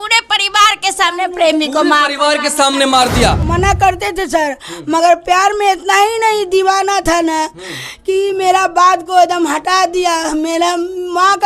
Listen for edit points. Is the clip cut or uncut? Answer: cut